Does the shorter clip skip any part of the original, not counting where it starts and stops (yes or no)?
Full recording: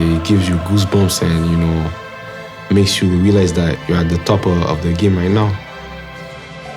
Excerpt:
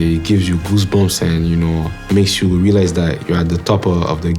yes